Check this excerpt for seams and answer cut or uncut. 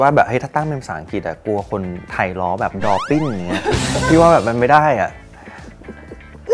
uncut